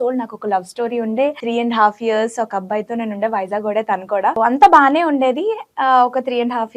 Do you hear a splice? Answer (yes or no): yes